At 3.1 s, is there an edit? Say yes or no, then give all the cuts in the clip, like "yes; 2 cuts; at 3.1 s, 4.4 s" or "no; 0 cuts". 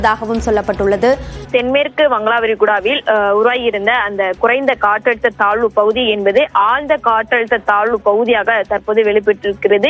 no; 1 cut; at 1.4 s